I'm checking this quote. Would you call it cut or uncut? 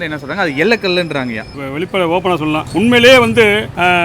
cut